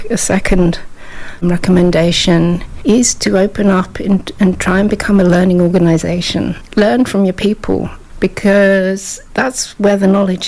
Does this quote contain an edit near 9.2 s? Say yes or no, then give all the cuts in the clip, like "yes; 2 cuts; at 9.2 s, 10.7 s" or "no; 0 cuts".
no; 3 cuts; at 1.4 s, 6.6 s, 8.0 s